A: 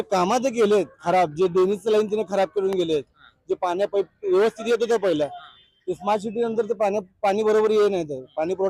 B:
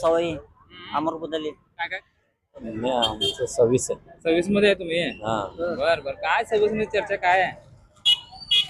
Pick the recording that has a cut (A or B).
B